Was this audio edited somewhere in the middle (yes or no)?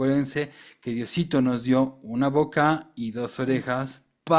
no